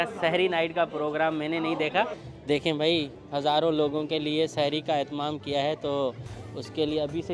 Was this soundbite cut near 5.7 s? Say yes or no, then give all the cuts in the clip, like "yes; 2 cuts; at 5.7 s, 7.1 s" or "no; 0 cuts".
no; 1 cut; at 2.3 s